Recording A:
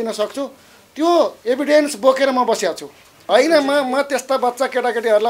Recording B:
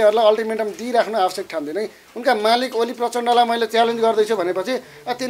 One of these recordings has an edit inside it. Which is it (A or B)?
A